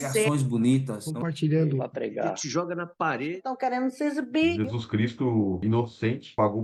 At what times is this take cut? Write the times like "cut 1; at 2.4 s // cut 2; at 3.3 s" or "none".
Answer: none